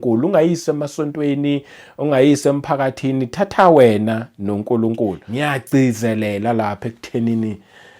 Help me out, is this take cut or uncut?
cut